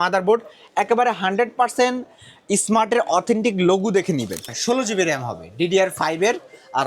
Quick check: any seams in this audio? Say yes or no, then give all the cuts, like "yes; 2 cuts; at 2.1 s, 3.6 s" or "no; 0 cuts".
yes; 1 cut; at 4.5 s